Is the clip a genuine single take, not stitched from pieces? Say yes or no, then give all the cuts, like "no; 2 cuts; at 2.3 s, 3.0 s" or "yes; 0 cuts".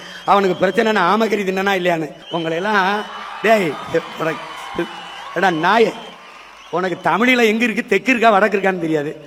yes; 0 cuts